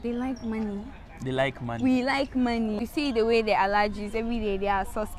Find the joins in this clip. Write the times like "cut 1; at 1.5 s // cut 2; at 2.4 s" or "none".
cut 1; at 2.8 s